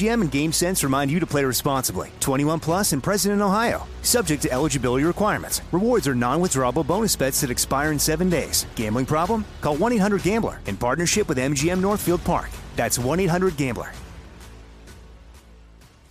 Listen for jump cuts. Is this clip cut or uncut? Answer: uncut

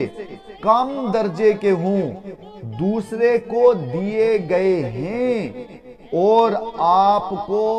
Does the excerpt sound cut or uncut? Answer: uncut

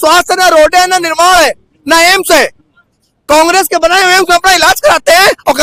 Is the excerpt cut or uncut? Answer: uncut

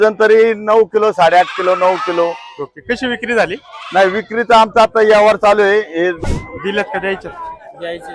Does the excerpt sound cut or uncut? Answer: cut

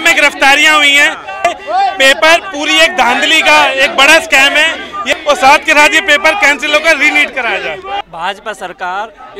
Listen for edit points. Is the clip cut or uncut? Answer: cut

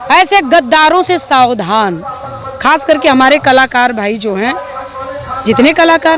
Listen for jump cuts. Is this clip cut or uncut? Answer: uncut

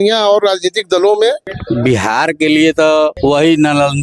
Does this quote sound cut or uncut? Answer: cut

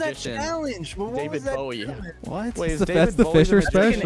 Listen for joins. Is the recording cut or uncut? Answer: cut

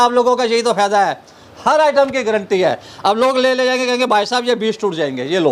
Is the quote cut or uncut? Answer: uncut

